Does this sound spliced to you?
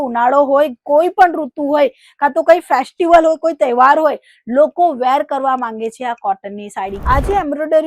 yes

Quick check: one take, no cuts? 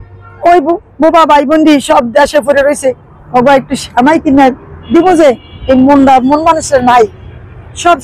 yes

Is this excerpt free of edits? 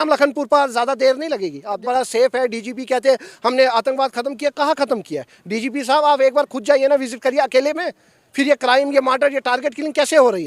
no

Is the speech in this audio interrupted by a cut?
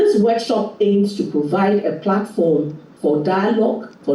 no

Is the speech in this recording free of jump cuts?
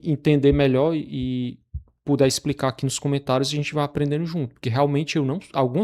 yes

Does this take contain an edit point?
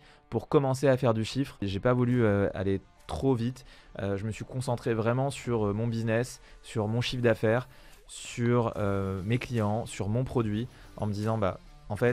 yes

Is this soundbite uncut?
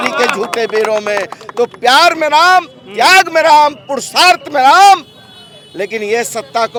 yes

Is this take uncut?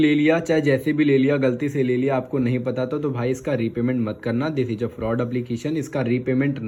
yes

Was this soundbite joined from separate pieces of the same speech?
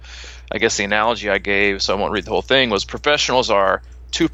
no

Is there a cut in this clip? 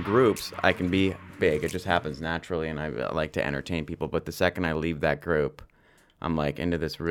no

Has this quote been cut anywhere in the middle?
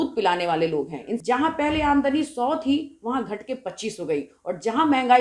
yes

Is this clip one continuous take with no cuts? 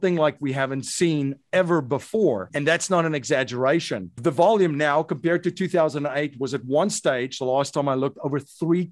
no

